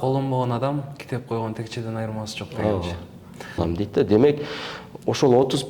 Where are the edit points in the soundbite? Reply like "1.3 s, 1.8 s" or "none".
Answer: 3.6 s